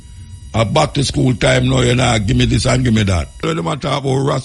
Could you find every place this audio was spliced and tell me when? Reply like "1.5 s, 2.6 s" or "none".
3.4 s